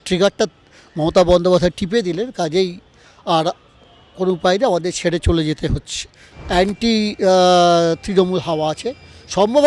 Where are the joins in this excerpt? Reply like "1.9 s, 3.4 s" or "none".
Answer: 6.2 s